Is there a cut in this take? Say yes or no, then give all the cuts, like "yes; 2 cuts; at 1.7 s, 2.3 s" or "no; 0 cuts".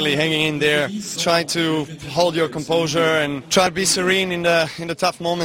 yes; 2 cuts; at 1.1 s, 3.4 s